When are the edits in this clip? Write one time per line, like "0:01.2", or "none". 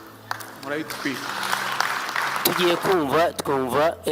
0:02.4